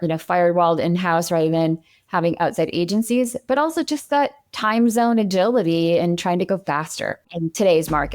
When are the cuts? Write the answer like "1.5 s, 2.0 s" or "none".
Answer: 7.2 s